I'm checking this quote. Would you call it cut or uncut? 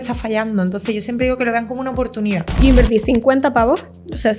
cut